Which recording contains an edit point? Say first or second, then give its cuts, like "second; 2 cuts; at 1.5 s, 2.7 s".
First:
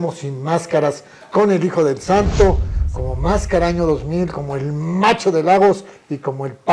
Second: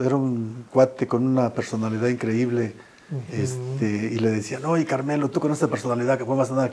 first; 1 cut; at 2.7 s